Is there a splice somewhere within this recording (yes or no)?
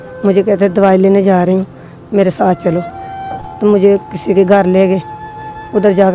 no